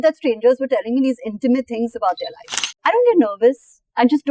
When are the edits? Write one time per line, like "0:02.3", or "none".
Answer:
0:02.7